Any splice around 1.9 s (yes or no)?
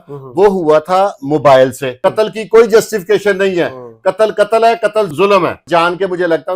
yes